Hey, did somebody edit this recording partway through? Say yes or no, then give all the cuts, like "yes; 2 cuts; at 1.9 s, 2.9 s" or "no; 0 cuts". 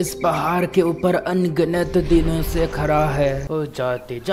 yes; 1 cut; at 3.4 s